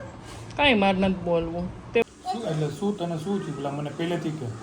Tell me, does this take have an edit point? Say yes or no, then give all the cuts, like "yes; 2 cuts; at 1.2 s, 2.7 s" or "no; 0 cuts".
yes; 1 cut; at 2.0 s